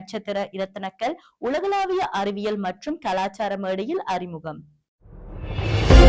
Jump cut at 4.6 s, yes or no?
yes